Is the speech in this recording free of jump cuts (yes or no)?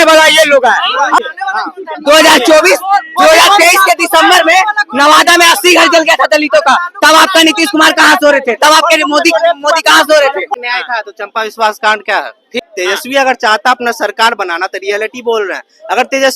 no